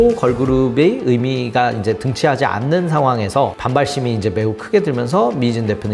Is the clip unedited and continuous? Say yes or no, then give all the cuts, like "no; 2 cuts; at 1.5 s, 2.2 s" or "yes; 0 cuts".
yes; 0 cuts